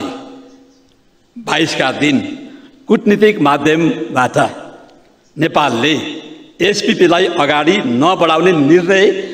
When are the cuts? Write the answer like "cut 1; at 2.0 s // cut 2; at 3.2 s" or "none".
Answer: none